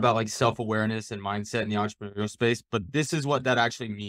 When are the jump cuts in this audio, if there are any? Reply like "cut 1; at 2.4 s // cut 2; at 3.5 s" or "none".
cut 1; at 2.9 s